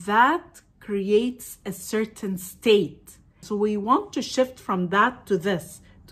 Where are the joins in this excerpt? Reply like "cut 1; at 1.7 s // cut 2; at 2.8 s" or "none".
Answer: cut 1; at 3.4 s